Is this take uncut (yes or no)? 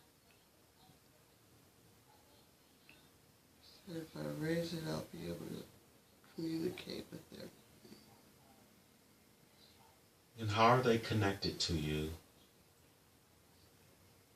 yes